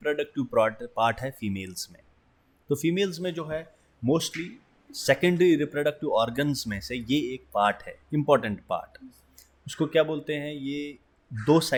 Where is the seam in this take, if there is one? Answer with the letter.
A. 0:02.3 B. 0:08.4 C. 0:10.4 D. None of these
D